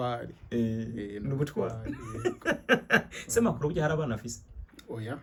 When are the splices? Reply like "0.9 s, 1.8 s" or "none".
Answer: none